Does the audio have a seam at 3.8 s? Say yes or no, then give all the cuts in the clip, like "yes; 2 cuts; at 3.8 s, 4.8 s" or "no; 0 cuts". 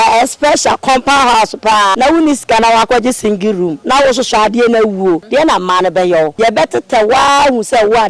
yes; 4 cuts; at 1.9 s, 3.8 s, 5.2 s, 6.3 s